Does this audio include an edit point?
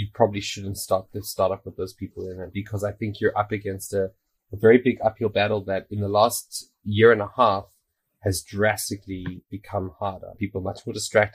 no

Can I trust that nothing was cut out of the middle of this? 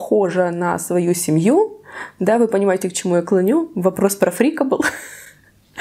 yes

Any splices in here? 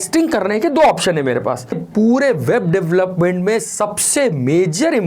yes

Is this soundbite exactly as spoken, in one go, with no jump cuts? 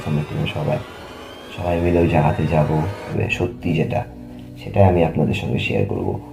no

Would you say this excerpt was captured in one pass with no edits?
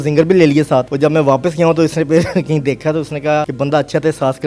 no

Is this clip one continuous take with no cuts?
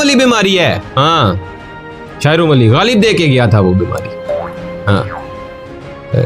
yes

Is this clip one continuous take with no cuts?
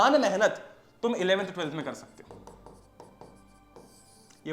yes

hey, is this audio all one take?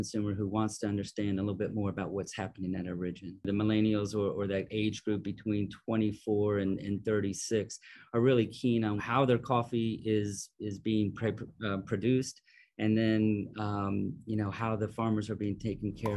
no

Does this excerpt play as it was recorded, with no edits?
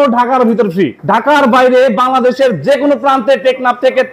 no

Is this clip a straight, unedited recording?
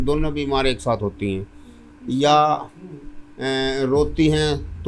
yes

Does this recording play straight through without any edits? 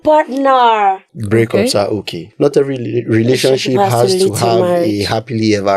no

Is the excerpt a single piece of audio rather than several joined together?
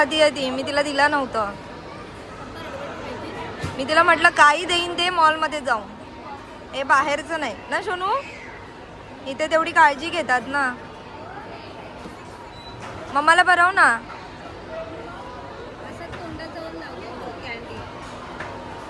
yes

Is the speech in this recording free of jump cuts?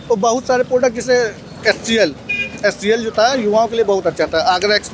yes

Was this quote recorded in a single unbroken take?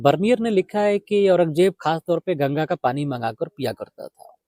yes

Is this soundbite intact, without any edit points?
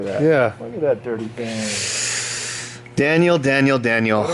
yes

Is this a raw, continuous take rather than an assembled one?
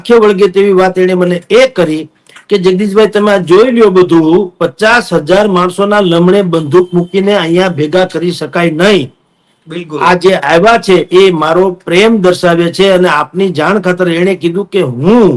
yes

